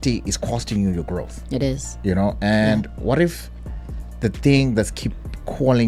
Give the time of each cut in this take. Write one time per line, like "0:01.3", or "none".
none